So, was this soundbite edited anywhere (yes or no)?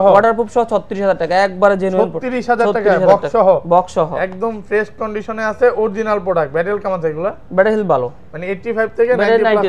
no